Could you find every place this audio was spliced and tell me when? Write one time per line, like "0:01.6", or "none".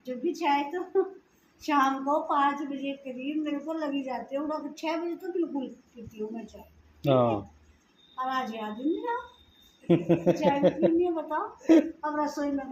none